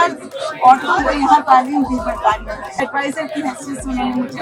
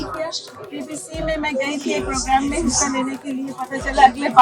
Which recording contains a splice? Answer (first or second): first